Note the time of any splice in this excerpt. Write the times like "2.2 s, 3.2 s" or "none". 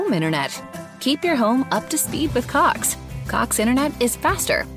none